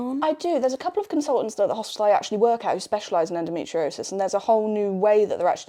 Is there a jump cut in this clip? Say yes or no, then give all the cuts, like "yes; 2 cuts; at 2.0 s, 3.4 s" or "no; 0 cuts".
no; 0 cuts